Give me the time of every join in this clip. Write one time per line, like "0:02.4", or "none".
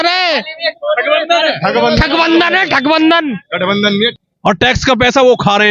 0:04.2